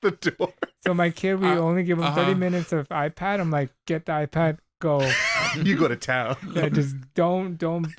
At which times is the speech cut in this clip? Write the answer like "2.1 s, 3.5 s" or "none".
none